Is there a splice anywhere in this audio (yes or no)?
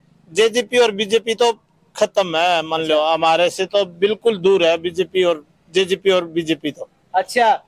no